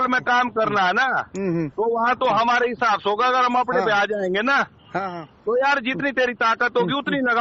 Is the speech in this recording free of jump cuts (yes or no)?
yes